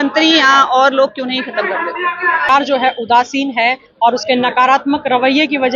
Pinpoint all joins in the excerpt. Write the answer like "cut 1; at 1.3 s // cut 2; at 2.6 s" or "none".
cut 1; at 2.5 s